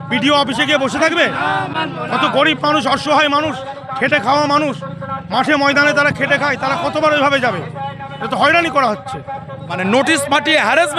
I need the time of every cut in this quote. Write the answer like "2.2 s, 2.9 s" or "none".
9.8 s